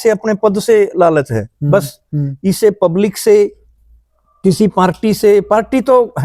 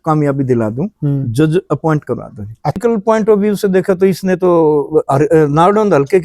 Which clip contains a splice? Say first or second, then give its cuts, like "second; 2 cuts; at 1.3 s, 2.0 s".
second; 1 cut; at 2.8 s